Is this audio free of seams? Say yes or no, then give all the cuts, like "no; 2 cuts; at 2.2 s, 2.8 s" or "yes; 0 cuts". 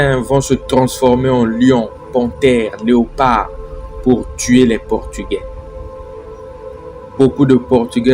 no; 2 cuts; at 5.4 s, 7.1 s